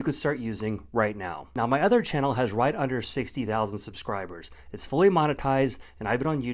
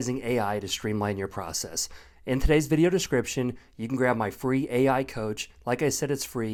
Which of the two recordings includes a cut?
first; 1 cut; at 1.4 s

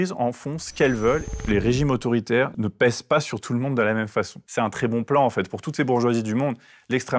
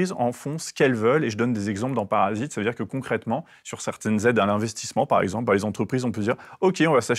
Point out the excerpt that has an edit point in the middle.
first; 3 cuts; at 1.4 s, 2.5 s, 4.4 s

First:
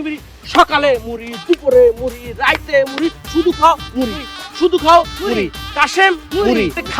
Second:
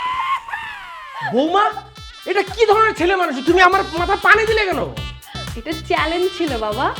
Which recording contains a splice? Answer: second; 1 cut; at 1.1 s

